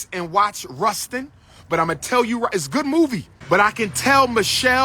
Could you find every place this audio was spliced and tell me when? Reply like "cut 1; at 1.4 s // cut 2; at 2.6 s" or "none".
cut 1; at 3.3 s